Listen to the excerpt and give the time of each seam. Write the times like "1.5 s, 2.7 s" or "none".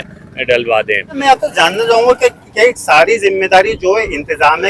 1.2 s